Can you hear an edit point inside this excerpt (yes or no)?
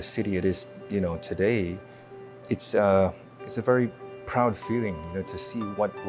no